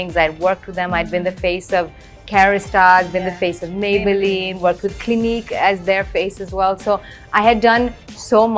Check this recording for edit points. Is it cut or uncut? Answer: uncut